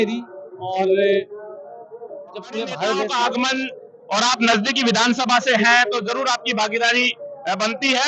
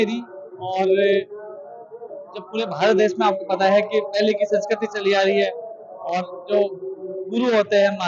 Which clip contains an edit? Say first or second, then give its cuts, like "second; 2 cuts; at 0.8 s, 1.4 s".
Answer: first; 1 cut; at 3.1 s